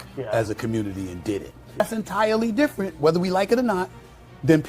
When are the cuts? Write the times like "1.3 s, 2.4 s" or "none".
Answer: 1.8 s

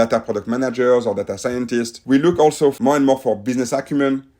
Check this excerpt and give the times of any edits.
2.0 s, 2.8 s

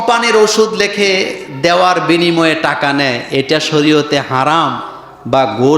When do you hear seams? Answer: none

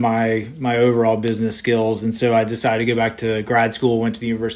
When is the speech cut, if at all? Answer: none

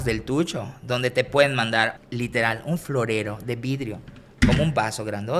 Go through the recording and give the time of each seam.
1.9 s

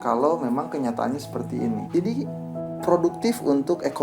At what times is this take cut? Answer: 1.9 s

